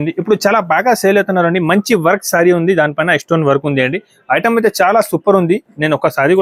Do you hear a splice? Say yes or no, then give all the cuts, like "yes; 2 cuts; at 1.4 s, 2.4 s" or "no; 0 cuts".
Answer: no; 0 cuts